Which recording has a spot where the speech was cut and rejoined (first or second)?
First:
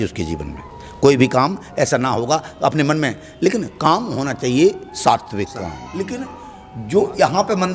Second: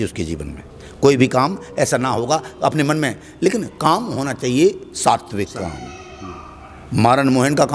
first